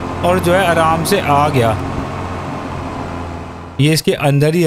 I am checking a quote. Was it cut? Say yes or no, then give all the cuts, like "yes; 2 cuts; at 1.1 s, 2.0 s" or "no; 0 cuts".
yes; 1 cut; at 3.5 s